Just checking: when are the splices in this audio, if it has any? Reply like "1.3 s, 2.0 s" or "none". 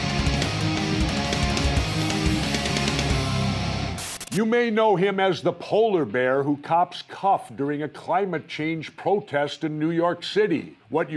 3.9 s, 6.6 s

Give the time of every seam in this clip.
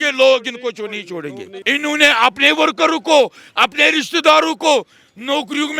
1.5 s

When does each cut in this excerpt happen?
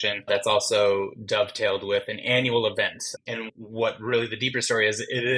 none

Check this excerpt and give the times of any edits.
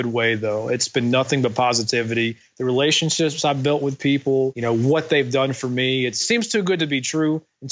4.6 s, 6.2 s

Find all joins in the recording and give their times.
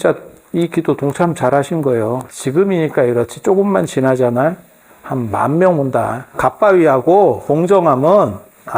2.3 s, 6.3 s, 7.4 s

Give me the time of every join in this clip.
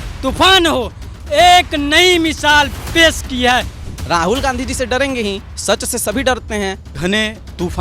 3.8 s, 5.5 s, 7.0 s

